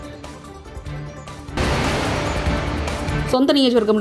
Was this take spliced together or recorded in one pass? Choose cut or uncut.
uncut